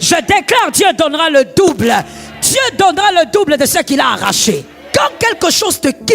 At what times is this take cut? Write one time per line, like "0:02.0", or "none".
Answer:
0:04.8